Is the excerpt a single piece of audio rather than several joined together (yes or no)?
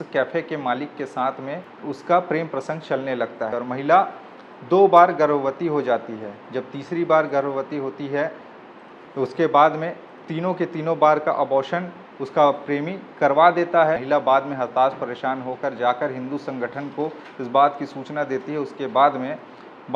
no